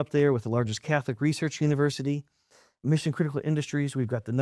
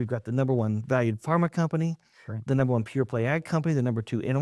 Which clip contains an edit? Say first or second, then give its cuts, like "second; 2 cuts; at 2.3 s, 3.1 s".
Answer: first; 1 cut; at 2.8 s